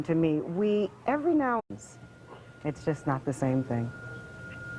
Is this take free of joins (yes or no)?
yes